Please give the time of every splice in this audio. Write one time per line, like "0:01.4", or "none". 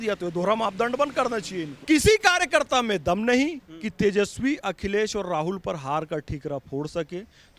0:01.8